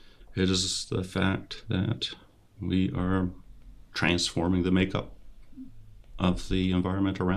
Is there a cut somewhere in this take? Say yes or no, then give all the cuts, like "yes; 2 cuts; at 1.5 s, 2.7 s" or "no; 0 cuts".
no; 0 cuts